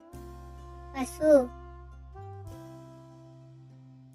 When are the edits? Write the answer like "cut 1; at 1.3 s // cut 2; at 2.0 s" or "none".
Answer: cut 1; at 0.9 s